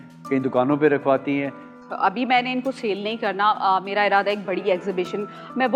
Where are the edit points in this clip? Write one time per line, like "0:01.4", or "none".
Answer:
none